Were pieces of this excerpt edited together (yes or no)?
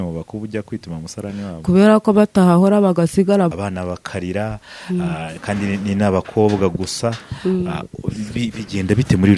yes